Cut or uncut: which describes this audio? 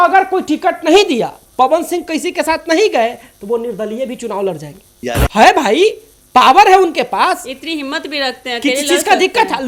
uncut